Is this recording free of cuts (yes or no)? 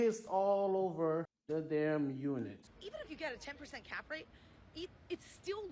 no